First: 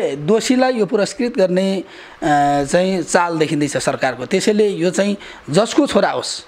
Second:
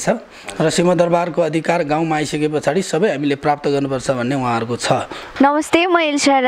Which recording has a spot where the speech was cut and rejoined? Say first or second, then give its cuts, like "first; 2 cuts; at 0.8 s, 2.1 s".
second; 1 cut; at 5.2 s